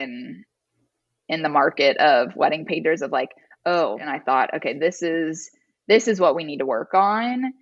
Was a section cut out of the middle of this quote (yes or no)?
yes